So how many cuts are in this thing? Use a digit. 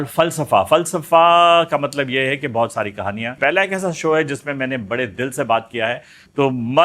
1